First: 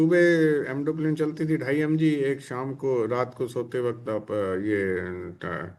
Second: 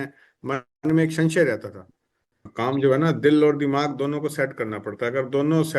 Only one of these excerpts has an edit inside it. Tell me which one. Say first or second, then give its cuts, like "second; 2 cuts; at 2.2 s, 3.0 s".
second; 1 cut; at 2.4 s